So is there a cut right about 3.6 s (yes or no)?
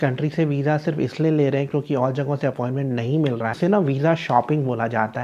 yes